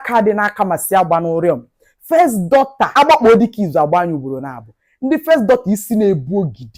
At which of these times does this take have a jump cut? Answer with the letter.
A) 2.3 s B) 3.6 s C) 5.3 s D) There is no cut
D